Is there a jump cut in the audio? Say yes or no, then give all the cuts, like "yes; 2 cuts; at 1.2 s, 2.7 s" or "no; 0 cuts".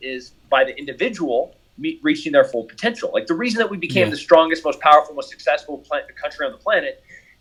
no; 0 cuts